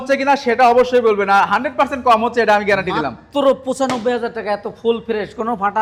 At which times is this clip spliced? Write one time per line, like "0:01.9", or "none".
none